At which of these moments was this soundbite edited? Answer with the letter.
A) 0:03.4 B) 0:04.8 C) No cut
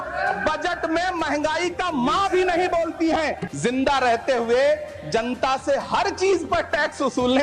A